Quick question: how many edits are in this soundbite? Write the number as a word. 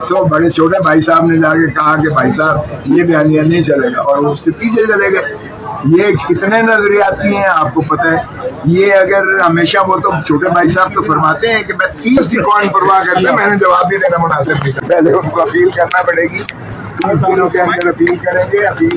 zero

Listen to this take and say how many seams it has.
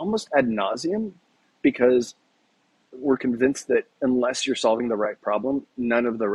one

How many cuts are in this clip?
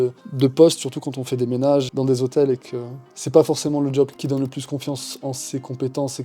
two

